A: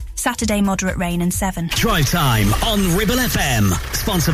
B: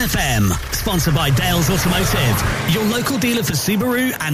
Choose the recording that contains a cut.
A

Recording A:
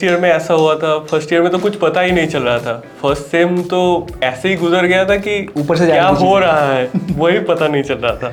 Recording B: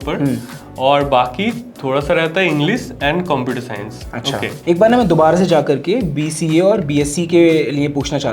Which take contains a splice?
B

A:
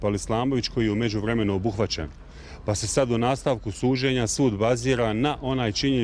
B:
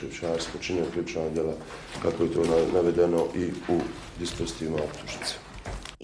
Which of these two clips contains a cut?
B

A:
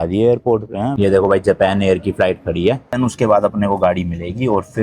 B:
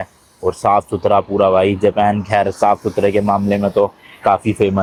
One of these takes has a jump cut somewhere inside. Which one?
A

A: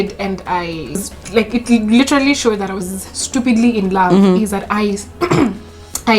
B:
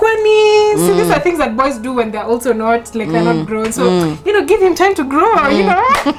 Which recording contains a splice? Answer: A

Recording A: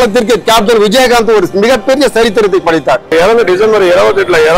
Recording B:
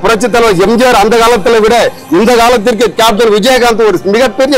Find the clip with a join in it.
A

